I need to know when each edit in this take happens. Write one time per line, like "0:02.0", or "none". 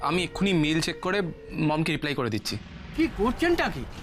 0:02.8